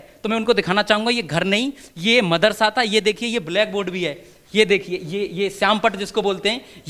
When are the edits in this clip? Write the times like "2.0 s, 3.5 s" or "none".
none

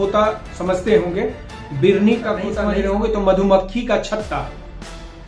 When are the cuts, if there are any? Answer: 2.6 s

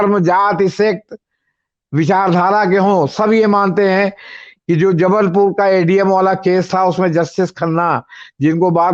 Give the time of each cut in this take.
none

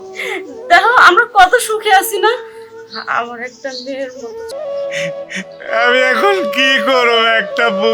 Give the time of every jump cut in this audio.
4.5 s

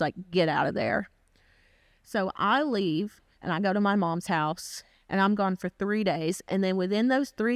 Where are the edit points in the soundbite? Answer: none

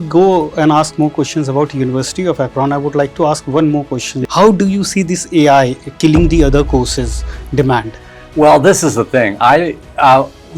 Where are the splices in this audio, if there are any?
4.2 s

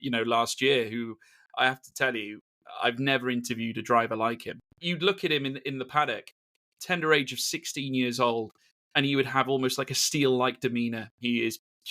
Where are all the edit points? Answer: 4.8 s, 11.2 s

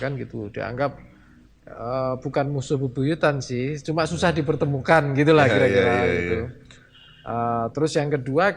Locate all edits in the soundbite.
none

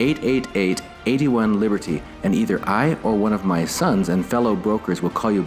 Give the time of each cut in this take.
none

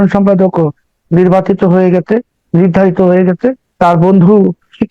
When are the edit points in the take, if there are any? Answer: 3.7 s

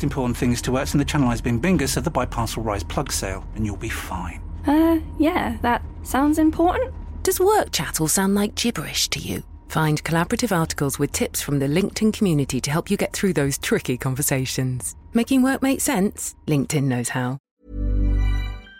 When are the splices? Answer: 17.5 s

